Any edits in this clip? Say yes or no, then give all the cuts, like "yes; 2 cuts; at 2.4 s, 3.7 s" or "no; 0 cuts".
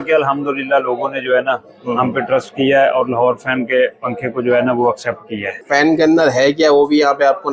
yes; 1 cut; at 5.5 s